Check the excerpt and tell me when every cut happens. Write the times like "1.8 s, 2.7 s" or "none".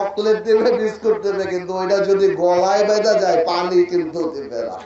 none